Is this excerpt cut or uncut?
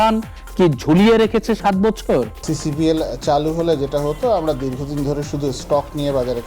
cut